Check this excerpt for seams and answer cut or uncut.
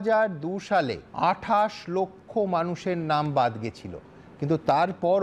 cut